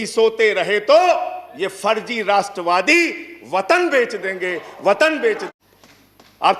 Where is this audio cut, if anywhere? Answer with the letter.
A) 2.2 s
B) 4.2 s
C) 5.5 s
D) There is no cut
C